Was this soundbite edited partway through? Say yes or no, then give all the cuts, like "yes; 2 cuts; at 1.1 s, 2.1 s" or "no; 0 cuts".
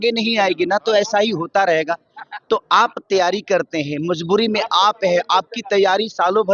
no; 0 cuts